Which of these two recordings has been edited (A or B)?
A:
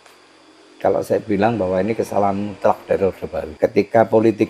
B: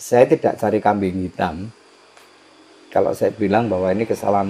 A